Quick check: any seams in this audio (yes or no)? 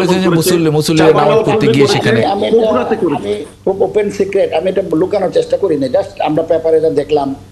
no